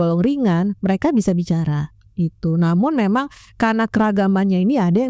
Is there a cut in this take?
no; 0 cuts

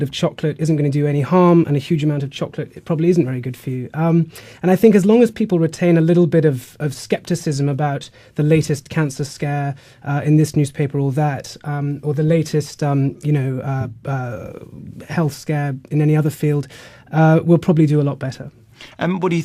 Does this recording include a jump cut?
yes; 1 cut; at 2.5 s

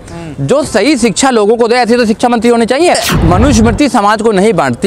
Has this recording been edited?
yes; 1 cut; at 3.1 s

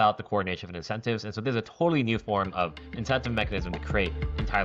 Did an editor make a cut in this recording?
no; 0 cuts

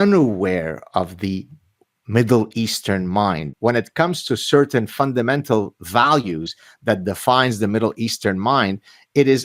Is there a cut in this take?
yes; 1 cut; at 3.5 s

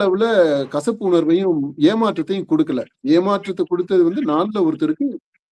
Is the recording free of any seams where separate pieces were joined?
yes; 0 cuts

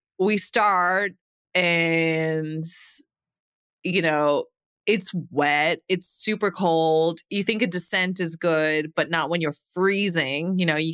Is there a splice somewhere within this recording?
no; 0 cuts

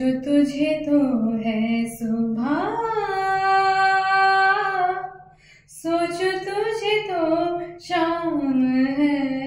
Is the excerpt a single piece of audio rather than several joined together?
yes; 0 cuts

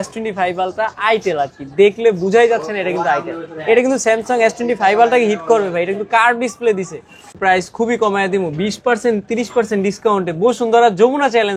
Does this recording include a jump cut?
yes; 1 cut; at 7.4 s

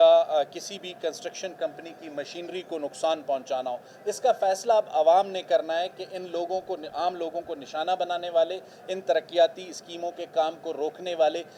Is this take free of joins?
yes; 0 cuts

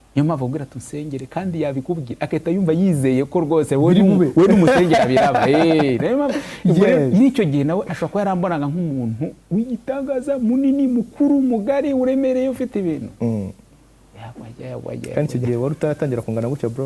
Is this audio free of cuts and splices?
yes; 0 cuts

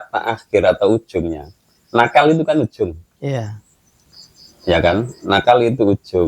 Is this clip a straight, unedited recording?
yes; 0 cuts

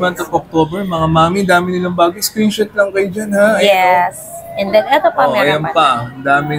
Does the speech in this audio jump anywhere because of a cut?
no; 0 cuts

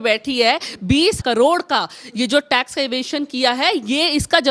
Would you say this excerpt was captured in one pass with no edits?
yes; 0 cuts

